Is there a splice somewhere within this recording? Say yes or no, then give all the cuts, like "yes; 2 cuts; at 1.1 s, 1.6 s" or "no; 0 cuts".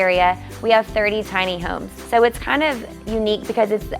yes; 1 cut; at 1.9 s